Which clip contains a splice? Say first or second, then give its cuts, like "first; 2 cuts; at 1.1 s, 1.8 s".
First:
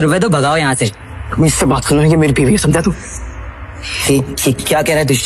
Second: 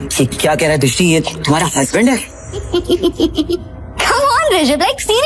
second; 1 cut; at 2.7 s